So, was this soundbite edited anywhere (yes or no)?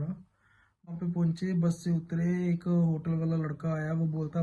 yes